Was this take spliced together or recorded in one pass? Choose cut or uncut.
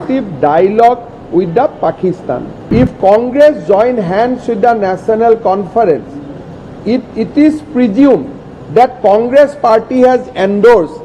cut